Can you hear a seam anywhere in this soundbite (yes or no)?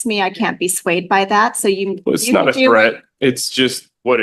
no